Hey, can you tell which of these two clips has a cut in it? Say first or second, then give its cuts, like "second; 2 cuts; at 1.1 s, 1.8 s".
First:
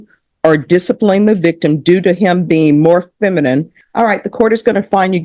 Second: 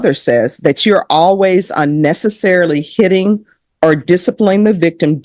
first; 1 cut; at 3.8 s